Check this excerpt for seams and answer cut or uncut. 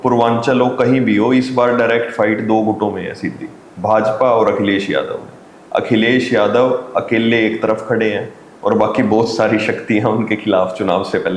uncut